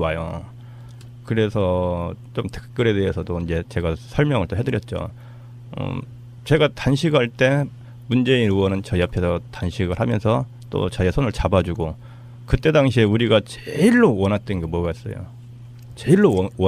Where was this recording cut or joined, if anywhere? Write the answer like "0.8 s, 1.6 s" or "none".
none